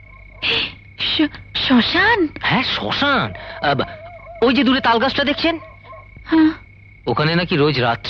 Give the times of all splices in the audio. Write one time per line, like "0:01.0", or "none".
none